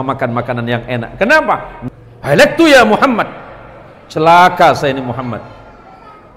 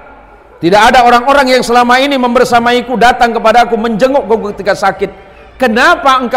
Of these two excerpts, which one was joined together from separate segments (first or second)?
first